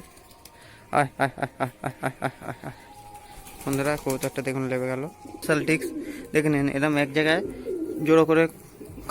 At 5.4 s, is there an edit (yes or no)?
yes